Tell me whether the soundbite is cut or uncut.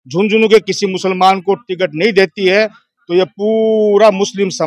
uncut